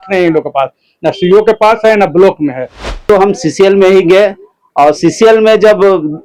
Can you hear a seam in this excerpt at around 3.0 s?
yes; 1 cut; at 3.0 s

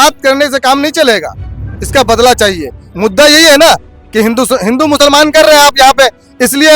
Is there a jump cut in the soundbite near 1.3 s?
no; 1 cut; at 2.8 s

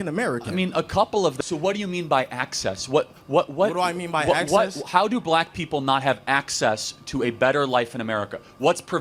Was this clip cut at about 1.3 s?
yes; 1 cut; at 1.3 s

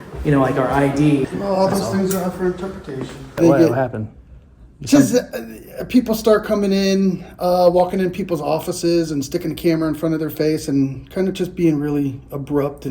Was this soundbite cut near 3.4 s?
yes; 2 cuts; at 1.3 s, 3.4 s

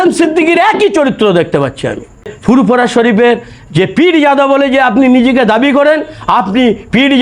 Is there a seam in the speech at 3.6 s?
no; 1 cut; at 2.3 s

